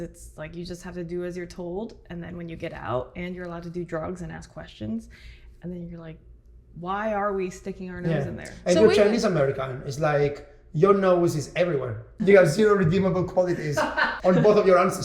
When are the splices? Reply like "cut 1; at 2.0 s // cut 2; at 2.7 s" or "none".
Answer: cut 1; at 12.1 s // cut 2; at 14.1 s